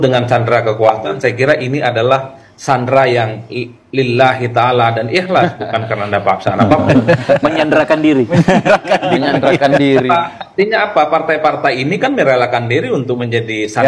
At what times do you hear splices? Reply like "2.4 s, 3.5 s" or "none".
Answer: none